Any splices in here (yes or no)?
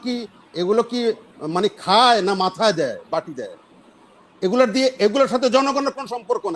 no